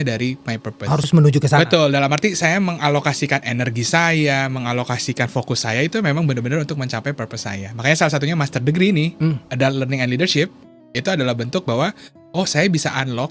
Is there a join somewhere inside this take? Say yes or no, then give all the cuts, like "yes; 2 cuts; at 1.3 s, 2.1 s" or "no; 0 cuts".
no; 0 cuts